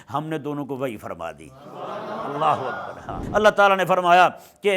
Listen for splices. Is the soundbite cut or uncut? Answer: cut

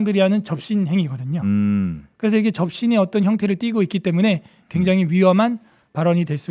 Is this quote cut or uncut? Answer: uncut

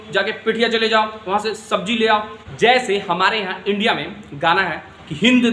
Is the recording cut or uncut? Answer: cut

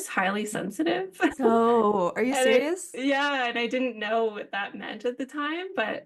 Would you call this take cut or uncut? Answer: uncut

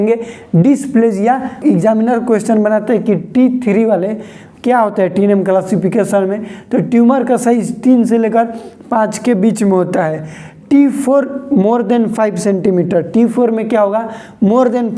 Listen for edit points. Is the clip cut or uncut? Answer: cut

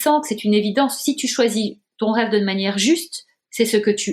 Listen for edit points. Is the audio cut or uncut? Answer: uncut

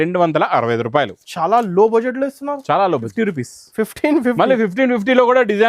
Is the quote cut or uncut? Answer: cut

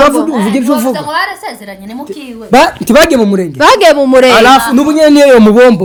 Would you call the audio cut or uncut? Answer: uncut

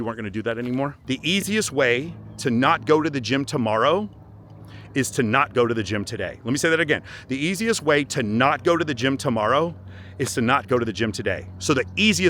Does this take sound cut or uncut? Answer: cut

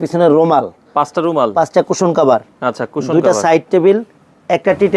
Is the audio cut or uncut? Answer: uncut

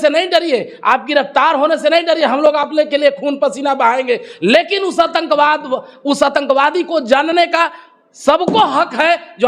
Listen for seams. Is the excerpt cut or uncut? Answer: uncut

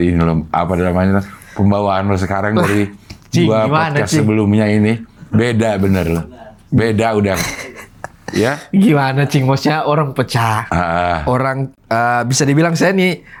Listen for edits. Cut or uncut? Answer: uncut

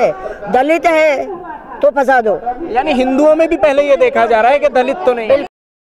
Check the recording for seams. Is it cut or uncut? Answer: uncut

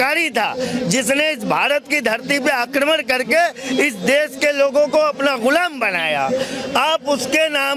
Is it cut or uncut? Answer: uncut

